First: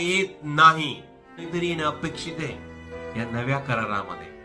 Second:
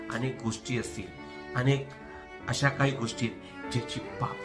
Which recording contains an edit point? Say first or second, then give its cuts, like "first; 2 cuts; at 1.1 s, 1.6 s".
first; 1 cut; at 1.5 s